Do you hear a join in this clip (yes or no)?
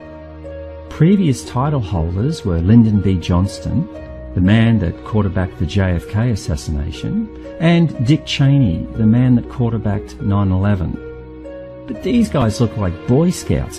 yes